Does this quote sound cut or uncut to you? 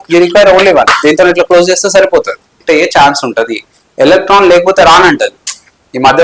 cut